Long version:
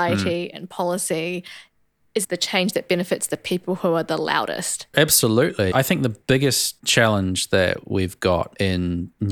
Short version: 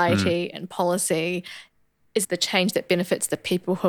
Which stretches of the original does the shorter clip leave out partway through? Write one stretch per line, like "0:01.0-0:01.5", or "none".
none